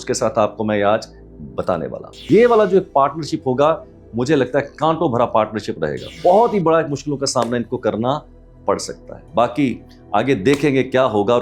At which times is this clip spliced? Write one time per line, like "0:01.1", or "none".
0:02.1
0:06.0